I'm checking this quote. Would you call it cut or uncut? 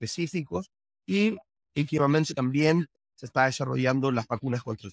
cut